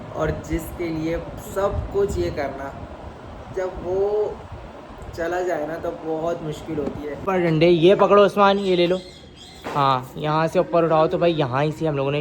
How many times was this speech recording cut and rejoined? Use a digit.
1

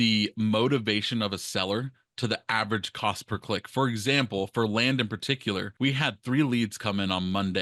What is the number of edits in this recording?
0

